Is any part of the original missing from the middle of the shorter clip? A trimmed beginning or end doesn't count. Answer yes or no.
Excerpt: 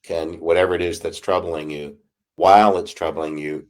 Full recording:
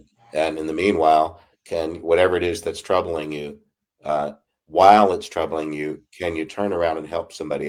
yes